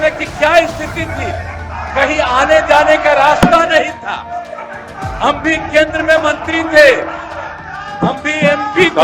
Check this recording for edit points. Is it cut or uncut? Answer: uncut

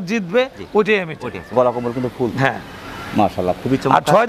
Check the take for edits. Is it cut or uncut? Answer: uncut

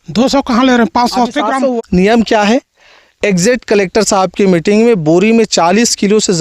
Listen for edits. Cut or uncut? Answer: cut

